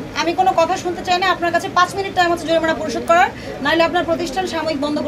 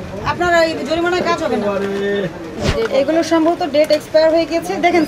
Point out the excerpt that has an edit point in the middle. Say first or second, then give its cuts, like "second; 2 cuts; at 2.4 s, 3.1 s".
second; 1 cut; at 2.5 s